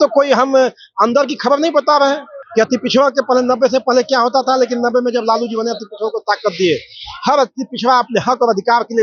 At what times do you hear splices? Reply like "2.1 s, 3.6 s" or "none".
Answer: 2.3 s

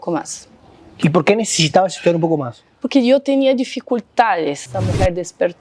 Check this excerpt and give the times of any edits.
4.7 s

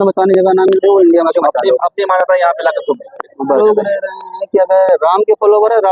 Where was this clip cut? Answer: 3.6 s

